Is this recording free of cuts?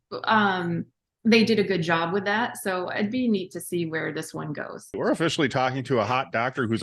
no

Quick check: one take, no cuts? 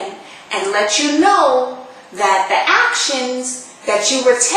yes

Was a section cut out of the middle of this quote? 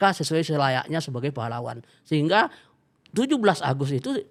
no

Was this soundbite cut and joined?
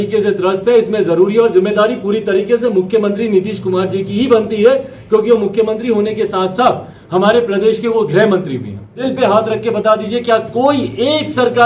yes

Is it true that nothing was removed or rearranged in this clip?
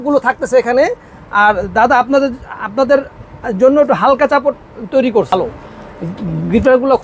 no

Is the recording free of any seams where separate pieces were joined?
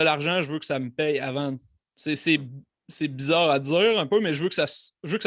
yes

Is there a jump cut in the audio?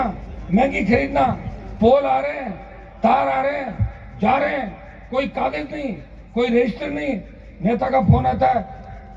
no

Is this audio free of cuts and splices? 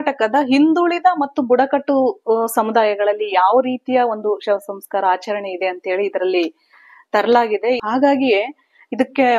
no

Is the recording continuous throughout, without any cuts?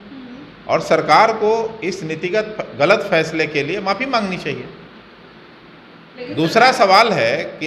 yes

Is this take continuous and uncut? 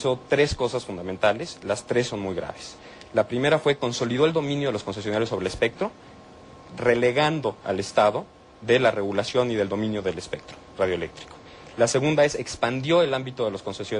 yes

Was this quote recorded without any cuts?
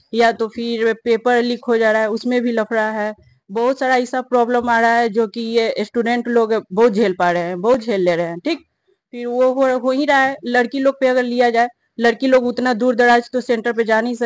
yes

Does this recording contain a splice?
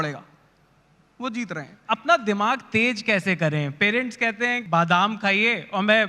yes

